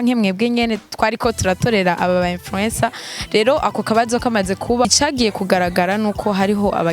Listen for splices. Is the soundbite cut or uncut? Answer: cut